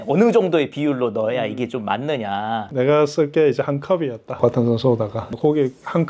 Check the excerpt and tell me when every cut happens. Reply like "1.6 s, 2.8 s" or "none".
2.7 s, 5.4 s